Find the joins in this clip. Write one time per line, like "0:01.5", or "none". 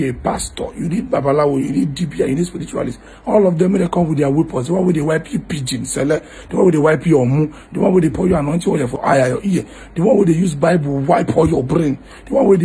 0:09.0

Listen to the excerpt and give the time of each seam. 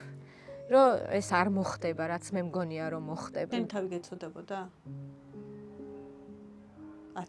0:03.5

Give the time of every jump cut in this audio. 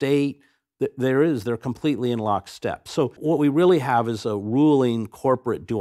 0:03.2

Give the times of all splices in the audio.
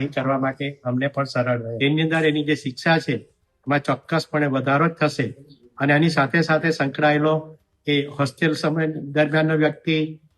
0:01.7

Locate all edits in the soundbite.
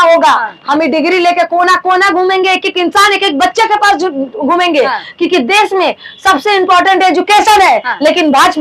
none

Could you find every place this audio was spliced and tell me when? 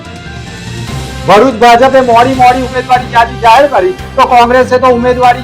0:01.1

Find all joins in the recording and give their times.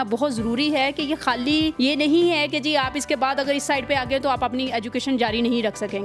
0:01.7

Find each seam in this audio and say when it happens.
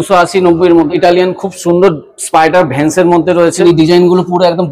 0:00.9
0:03.6

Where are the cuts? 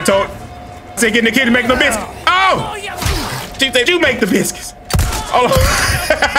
0:01.0
0:03.9

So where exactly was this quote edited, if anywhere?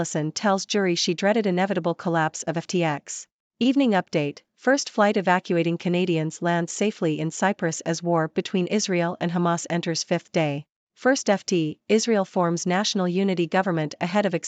0:03.5
0:10.8

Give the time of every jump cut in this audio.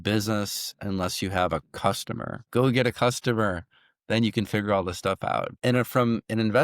0:02.4
0:05.5

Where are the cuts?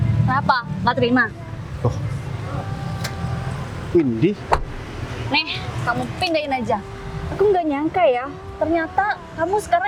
none

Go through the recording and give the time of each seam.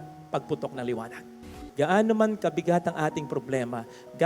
0:01.4

